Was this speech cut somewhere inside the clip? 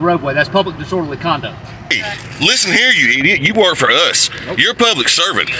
yes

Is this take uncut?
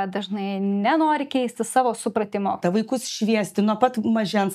no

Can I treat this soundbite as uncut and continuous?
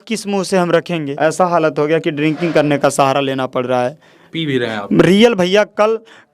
no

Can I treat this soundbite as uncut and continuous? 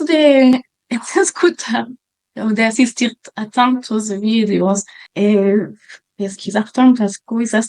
no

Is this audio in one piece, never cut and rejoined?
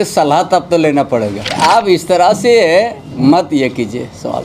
no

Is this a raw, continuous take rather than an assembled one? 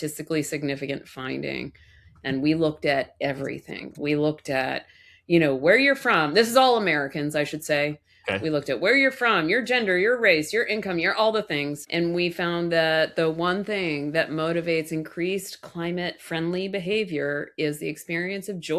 no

